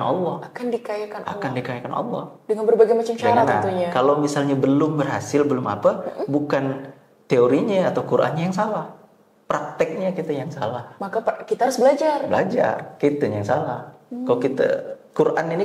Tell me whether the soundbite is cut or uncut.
uncut